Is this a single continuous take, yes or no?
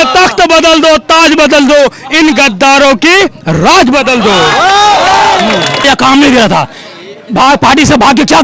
no